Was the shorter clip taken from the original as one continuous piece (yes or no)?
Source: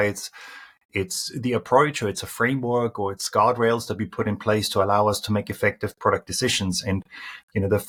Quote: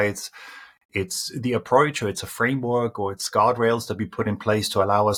yes